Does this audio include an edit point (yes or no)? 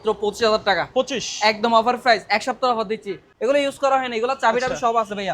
yes